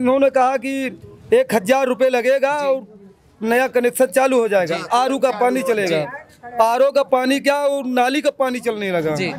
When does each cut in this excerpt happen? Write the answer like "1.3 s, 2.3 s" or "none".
none